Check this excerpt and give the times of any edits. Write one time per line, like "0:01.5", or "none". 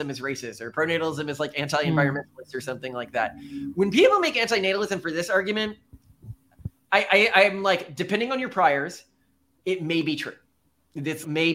none